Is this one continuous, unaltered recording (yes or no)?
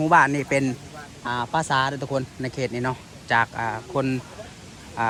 yes